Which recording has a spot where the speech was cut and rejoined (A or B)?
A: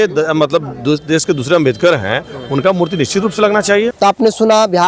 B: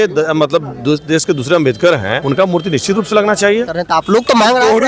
B